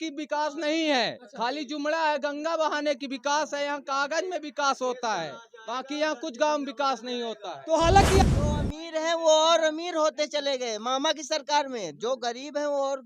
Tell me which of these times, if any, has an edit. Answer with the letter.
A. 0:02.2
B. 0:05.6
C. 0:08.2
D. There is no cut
C